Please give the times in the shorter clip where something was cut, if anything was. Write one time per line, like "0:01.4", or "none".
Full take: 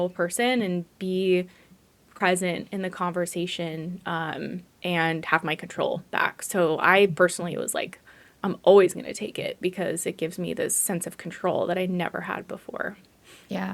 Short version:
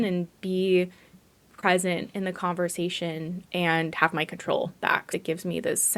0:03.4
0:05.1